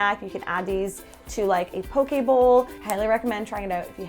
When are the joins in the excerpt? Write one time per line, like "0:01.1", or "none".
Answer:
0:02.8